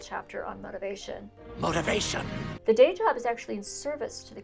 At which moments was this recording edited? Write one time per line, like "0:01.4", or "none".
0:02.6